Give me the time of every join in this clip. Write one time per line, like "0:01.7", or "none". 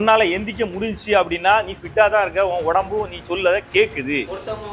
none